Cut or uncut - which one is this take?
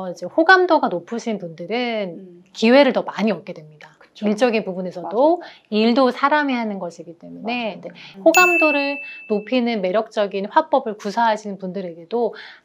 uncut